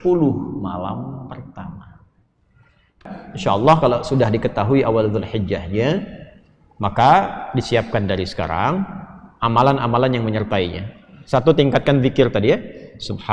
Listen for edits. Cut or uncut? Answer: cut